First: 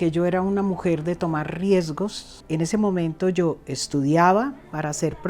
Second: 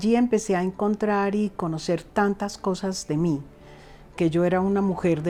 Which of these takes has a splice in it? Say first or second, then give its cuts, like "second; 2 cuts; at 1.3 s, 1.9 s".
first; 1 cut; at 2.4 s